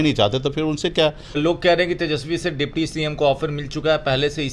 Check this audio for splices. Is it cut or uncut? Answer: cut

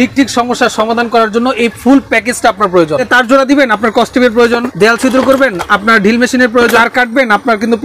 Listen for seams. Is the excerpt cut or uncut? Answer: cut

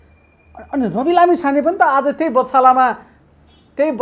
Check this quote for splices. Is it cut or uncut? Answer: uncut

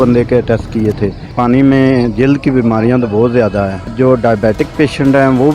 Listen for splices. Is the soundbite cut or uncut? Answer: cut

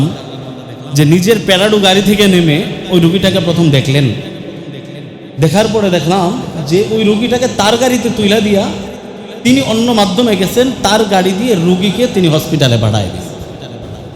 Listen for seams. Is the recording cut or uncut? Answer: uncut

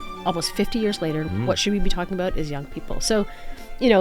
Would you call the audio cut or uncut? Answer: cut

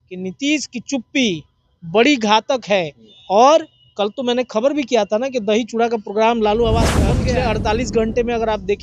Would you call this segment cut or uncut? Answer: cut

